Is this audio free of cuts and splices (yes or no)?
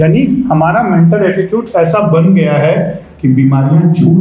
yes